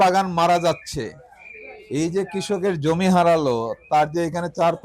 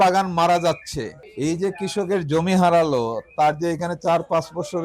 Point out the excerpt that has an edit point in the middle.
second; 1 cut; at 1.2 s

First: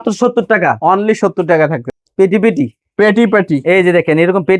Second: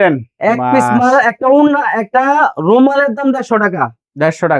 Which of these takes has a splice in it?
first; 1 cut; at 1.9 s

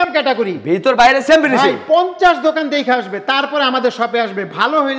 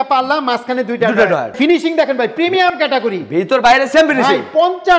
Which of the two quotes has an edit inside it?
second; 1 cut; at 1.5 s

